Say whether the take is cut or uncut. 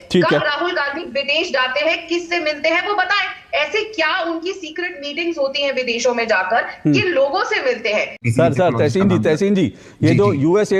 cut